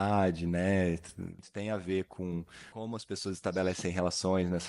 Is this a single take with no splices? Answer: no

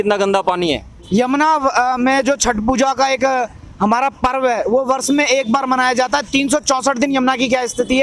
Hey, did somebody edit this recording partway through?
yes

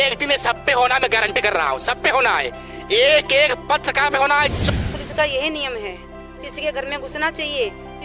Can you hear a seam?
yes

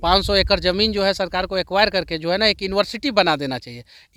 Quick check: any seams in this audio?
no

